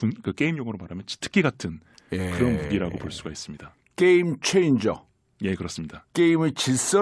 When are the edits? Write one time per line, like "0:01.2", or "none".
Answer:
0:04.2